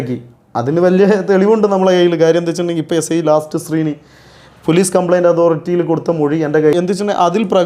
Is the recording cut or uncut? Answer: cut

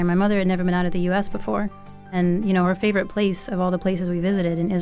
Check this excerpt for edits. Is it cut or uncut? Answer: cut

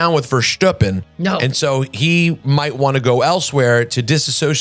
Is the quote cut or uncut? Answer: uncut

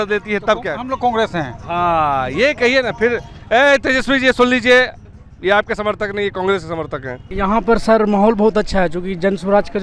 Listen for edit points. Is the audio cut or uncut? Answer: cut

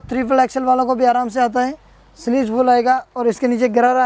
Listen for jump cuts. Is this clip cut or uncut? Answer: uncut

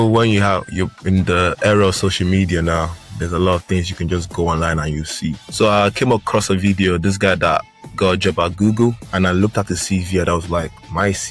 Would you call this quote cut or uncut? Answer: uncut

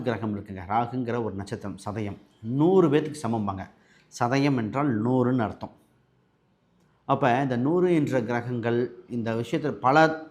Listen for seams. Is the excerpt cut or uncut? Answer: uncut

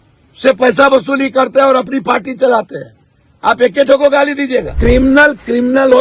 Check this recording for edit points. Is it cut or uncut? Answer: cut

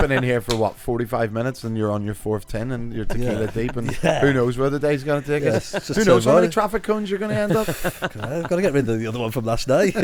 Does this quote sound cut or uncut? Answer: uncut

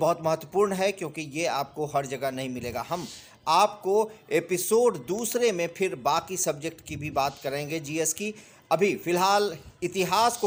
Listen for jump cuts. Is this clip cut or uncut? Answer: uncut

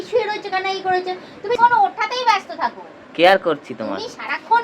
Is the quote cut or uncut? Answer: cut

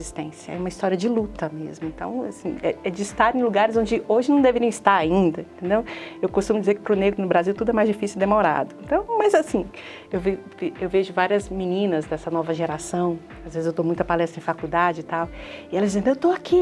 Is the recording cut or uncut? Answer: uncut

